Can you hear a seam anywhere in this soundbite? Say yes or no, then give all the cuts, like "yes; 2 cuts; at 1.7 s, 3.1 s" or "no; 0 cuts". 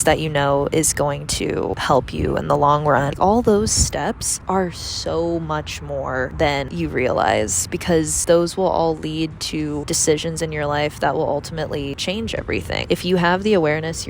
yes; 1 cut; at 3.2 s